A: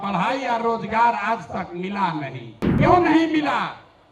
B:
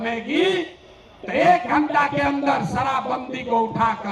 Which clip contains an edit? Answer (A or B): A